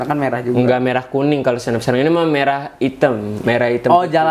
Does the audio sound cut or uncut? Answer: uncut